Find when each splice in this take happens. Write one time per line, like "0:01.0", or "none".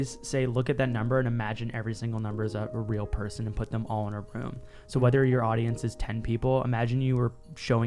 none